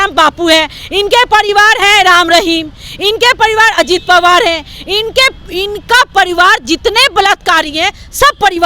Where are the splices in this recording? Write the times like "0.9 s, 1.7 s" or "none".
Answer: none

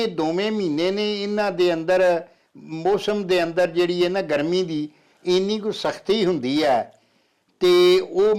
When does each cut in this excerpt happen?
none

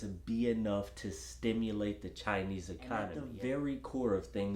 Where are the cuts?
3.2 s

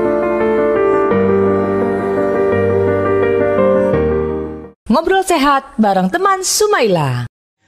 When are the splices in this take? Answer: none

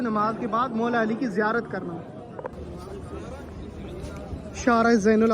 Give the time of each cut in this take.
2.5 s

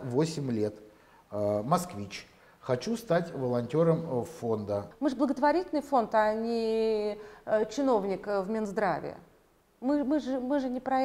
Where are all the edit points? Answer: 4.9 s

